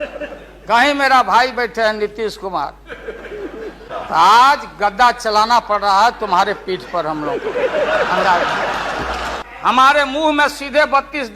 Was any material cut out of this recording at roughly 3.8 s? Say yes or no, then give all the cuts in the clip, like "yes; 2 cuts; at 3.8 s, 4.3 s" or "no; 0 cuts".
yes; 2 cuts; at 3.8 s, 9.3 s